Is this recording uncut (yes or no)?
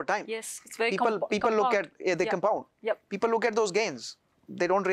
yes